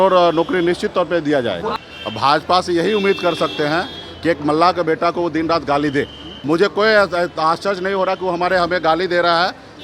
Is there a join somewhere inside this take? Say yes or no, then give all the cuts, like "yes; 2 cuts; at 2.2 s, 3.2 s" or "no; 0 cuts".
yes; 2 cuts; at 1.7 s, 6.3 s